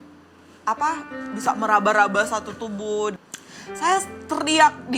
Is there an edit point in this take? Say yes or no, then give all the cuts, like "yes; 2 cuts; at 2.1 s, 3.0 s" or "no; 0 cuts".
yes; 1 cut; at 3.1 s